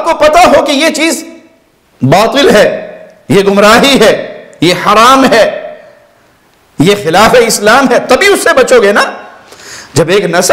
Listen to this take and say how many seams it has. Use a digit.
0